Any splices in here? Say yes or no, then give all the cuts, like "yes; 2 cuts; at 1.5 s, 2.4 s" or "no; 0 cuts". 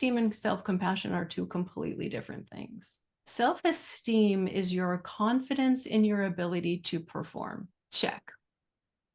no; 0 cuts